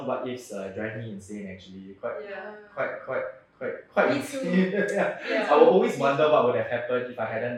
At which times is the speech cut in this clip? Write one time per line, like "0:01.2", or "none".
none